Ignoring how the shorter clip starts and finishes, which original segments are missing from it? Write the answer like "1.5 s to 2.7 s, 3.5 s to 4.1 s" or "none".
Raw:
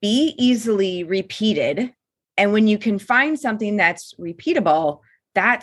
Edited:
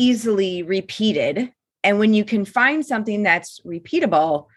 2.0 s to 2.2 s